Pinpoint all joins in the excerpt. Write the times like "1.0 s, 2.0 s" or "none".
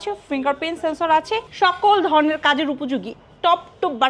1.4 s